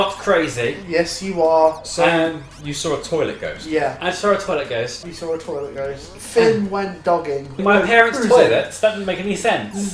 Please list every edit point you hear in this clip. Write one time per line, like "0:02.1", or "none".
0:05.0
0:06.2
0:07.6